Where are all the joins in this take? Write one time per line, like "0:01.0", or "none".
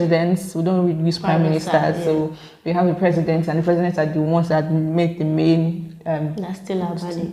none

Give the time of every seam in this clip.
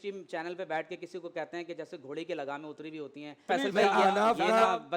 0:03.4

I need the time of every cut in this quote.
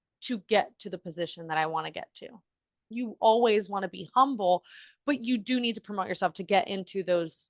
0:02.9

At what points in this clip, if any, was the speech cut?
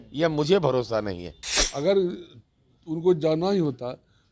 0:01.7

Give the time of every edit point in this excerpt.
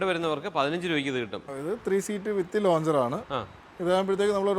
0:01.4

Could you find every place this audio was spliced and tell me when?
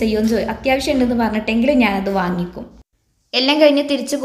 none

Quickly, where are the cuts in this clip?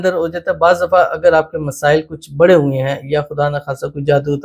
none

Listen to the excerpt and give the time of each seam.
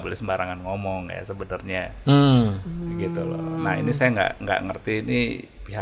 none

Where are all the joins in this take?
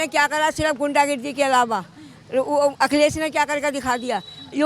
none

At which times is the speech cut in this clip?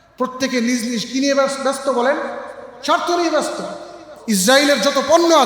0:04.1

